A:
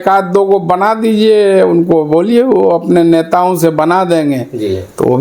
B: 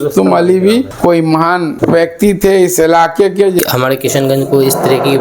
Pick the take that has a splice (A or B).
B